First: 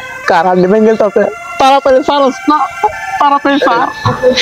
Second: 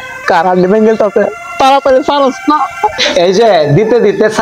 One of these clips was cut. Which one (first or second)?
second